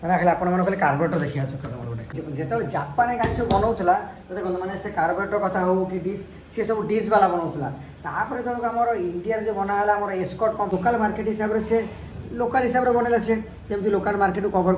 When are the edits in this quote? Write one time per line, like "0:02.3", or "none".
0:02.1
0:10.7

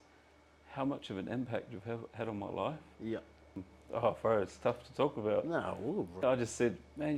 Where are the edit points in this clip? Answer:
0:03.7
0:06.2

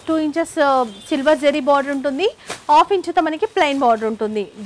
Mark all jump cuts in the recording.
none

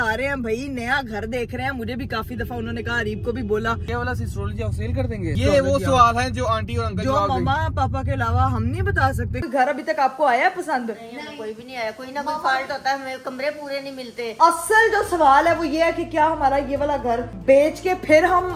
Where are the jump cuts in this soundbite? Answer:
0:03.9
0:05.4
0:09.4
0:14.4

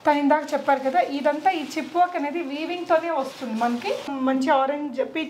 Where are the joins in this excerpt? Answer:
0:04.1

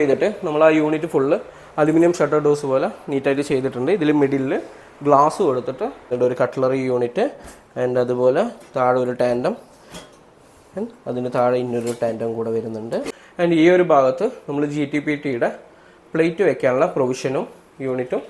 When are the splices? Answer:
0:06.1
0:13.2

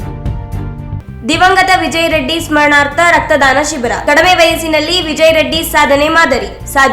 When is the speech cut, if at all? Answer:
0:01.0

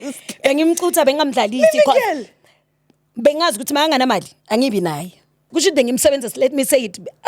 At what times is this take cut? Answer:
0:05.5

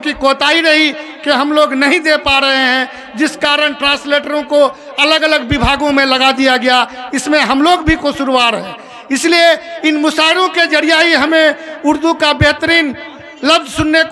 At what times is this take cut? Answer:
none

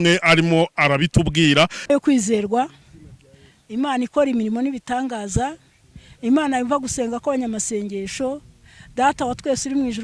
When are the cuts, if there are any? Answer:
0:01.9

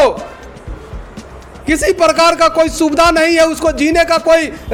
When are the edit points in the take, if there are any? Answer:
none

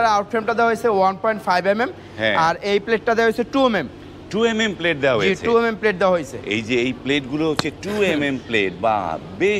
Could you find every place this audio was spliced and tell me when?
none

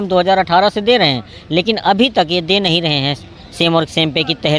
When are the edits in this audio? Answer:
none

